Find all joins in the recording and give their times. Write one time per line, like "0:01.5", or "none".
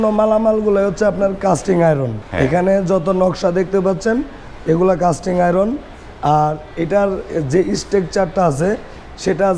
0:02.2